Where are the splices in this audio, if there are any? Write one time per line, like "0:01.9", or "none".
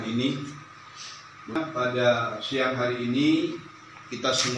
0:01.6